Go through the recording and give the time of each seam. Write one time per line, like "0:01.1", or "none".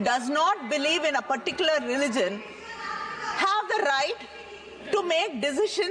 none